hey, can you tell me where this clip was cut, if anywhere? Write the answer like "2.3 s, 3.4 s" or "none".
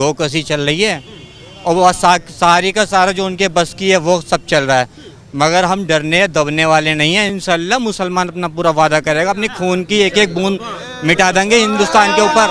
7.3 s